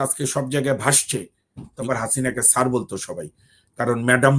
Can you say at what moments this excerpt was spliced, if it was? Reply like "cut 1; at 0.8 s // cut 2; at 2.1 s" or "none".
cut 1; at 1.9 s

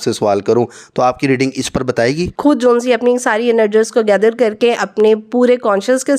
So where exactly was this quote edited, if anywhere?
cut 1; at 2.3 s

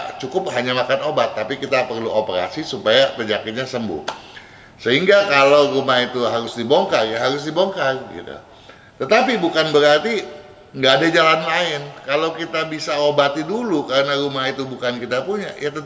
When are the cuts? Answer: none

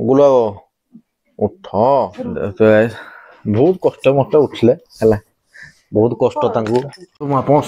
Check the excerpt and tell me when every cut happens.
cut 1; at 2.2 s

